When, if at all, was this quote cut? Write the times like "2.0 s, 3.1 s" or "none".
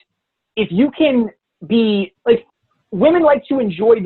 2.1 s